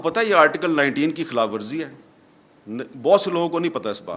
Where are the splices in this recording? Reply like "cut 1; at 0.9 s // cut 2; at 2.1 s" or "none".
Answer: none